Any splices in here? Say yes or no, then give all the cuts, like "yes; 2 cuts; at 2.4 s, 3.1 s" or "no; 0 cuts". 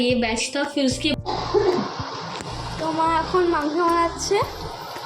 yes; 1 cut; at 1.1 s